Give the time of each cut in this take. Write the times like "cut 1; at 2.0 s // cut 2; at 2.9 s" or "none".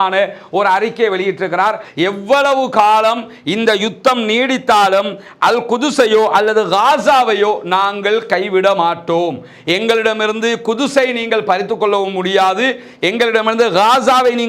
cut 1; at 1.8 s